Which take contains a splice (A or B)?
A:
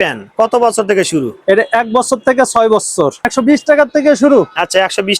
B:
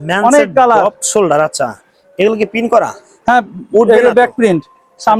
A